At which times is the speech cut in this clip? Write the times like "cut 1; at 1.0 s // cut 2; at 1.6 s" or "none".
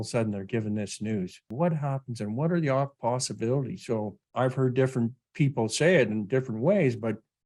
cut 1; at 1.5 s // cut 2; at 4.2 s